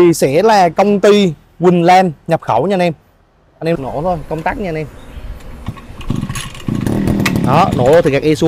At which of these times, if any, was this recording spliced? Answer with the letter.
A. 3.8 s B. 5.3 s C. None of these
A